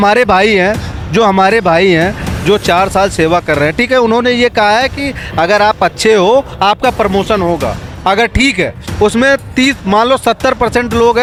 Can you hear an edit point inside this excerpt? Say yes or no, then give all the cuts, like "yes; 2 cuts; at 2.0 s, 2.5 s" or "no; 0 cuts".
no; 0 cuts